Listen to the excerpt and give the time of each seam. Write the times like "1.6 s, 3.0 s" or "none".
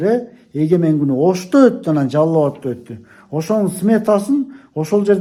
none